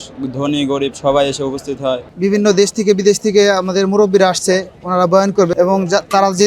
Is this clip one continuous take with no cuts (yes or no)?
no